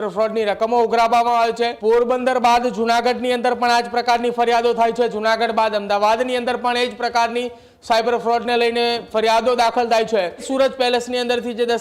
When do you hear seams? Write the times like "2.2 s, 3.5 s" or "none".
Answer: 1.8 s, 10.5 s